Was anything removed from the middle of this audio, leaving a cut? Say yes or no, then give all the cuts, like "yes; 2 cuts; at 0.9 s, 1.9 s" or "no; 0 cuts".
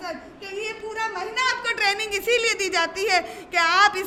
no; 0 cuts